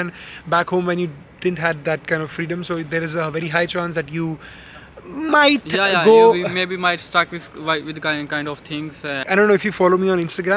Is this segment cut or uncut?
uncut